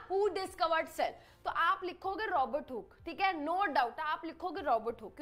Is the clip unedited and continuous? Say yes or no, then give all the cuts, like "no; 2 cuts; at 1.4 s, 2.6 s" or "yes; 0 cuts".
yes; 0 cuts